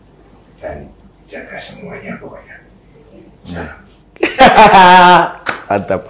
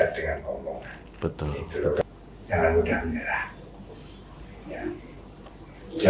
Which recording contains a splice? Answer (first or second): second